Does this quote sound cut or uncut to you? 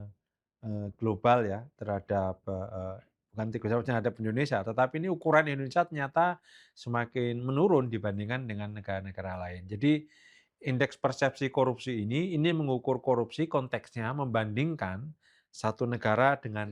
uncut